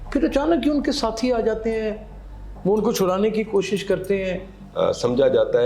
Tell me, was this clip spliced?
yes; 1 cut; at 4.5 s

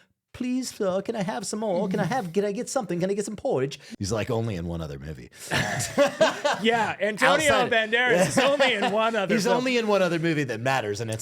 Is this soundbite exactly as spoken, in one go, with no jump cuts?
no; 1 cut; at 3.8 s

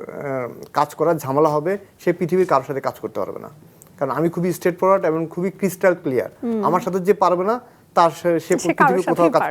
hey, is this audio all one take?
yes; 0 cuts

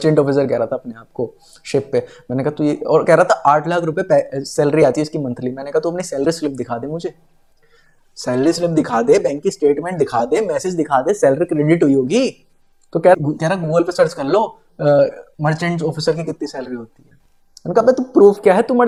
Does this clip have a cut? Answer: no; 0 cuts

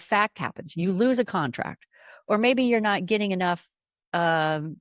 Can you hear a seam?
no; 0 cuts

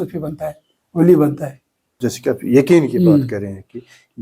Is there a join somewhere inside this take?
yes; 1 cut; at 1.4 s

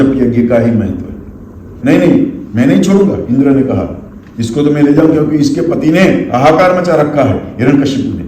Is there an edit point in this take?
yes; 1 cut; at 1.7 s

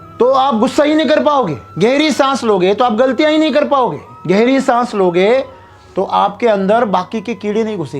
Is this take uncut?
no; 2 cuts; at 1.6 s, 4.1 s

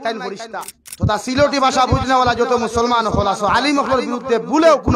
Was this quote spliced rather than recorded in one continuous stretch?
yes; 1 cut; at 1.2 s

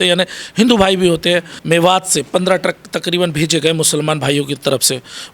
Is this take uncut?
no; 1 cut; at 1.5 s

